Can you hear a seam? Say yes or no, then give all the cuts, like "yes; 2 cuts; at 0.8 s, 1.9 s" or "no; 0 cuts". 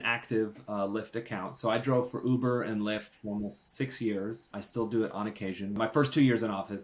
yes; 2 cuts; at 4.6 s, 5.8 s